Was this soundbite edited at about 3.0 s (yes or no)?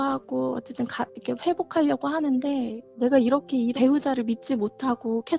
yes